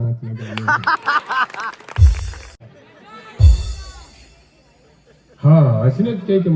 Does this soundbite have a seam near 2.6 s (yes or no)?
yes